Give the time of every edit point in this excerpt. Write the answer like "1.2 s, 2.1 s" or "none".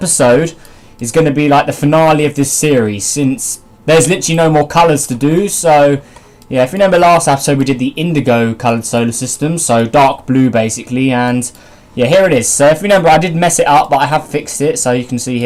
none